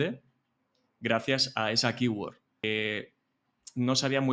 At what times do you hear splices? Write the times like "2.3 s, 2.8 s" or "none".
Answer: 2.5 s